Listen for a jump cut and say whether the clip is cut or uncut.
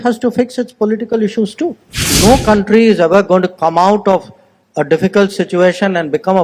cut